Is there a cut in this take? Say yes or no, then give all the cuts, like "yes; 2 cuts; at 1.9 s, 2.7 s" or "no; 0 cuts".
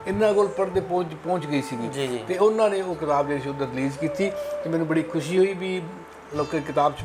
no; 0 cuts